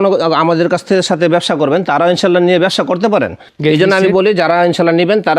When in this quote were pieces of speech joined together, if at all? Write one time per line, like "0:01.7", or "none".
0:03.4